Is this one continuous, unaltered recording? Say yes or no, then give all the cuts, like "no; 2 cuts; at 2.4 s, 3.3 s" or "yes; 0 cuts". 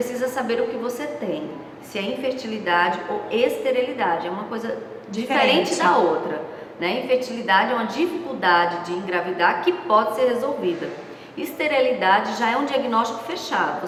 yes; 0 cuts